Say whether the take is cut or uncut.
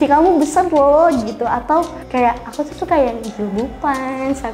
cut